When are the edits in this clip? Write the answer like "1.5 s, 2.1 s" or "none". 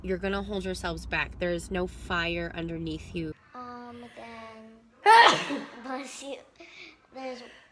3.3 s